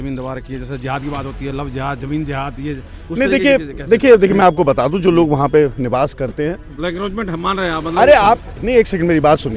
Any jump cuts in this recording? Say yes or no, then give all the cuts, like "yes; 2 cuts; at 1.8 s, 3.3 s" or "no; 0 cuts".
yes; 1 cut; at 6.8 s